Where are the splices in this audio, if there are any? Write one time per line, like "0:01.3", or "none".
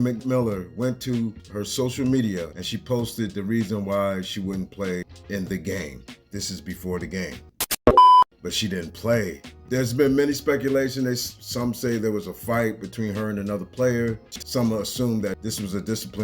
0:08.4
0:14.3